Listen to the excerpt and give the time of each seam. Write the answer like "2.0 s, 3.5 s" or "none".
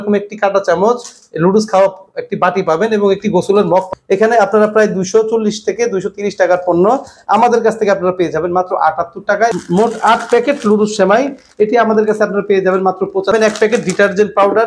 3.9 s, 9.5 s, 13.3 s